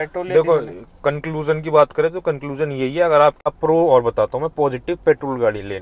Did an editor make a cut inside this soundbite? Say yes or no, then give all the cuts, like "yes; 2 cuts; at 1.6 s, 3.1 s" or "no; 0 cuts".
yes; 1 cut; at 3.5 s